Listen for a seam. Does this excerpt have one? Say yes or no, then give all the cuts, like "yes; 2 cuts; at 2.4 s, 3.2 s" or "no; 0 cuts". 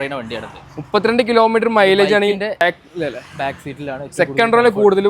yes; 1 cut; at 2.6 s